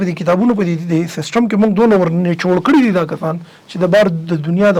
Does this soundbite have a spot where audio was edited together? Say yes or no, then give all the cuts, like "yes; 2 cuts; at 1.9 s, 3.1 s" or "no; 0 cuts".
no; 0 cuts